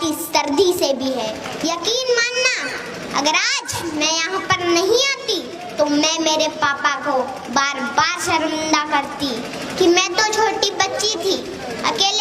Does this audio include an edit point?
yes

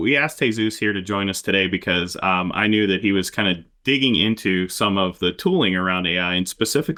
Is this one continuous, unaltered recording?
yes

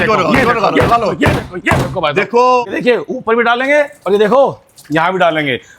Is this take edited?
yes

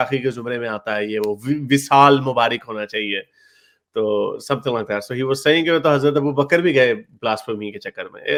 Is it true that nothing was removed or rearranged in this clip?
yes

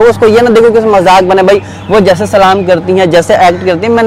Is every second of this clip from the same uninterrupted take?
yes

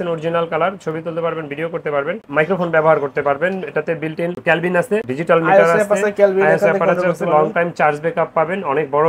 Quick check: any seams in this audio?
no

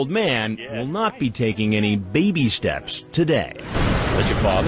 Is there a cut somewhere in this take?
yes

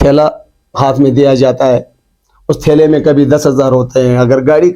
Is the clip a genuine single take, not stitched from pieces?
yes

